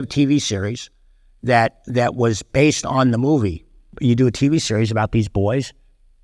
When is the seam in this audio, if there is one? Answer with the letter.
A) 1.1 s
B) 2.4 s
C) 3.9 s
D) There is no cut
C